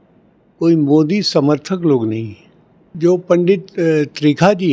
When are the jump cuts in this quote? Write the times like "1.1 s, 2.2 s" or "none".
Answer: 2.8 s